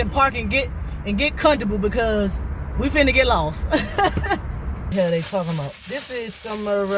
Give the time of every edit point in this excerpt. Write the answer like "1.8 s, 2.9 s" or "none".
4.9 s